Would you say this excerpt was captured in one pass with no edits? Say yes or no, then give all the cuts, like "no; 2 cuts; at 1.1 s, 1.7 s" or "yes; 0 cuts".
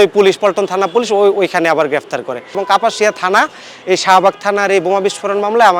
no; 1 cut; at 2.6 s